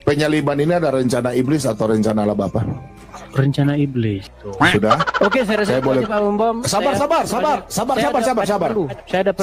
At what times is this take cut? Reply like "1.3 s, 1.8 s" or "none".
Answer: 4.3 s